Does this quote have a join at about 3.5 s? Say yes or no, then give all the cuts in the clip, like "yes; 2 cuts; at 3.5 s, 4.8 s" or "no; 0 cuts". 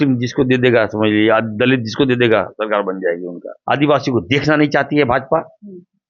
yes; 1 cut; at 3.5 s